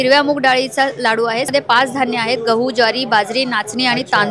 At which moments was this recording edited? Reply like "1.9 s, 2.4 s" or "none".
1.5 s